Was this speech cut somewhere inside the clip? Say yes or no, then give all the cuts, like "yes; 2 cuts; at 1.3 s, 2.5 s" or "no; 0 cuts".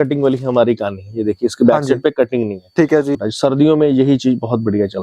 yes; 1 cut; at 3.1 s